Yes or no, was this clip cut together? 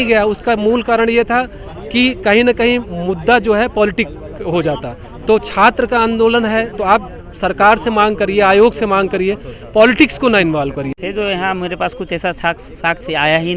yes